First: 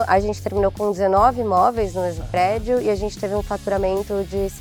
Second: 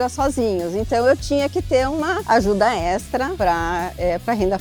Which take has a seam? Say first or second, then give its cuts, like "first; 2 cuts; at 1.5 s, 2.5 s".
second; 2 cuts; at 2.2 s, 3.3 s